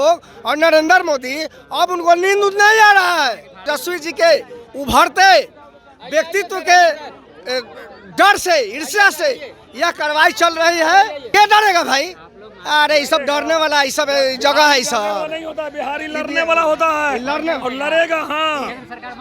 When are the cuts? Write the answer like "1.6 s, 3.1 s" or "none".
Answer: 3.7 s, 11.2 s